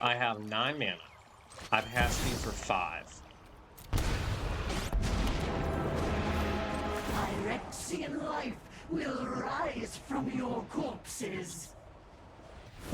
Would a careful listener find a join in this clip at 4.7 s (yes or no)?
yes